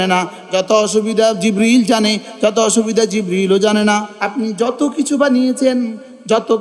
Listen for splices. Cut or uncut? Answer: cut